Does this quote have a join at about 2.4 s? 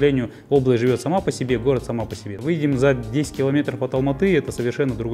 yes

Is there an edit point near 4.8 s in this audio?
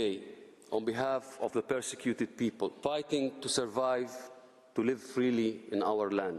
no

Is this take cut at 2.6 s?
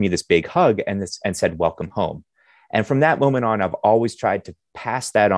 no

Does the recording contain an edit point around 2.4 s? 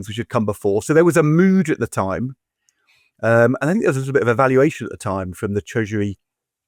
no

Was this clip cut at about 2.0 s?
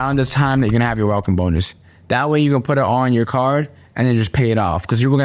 no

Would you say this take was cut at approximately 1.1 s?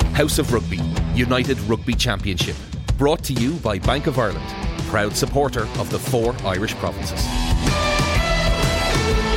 no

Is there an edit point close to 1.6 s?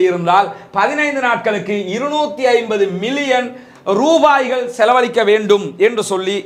no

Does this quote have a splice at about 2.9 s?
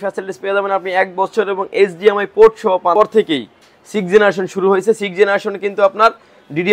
yes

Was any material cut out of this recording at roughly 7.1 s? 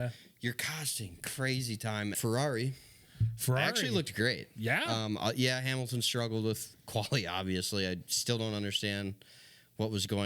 no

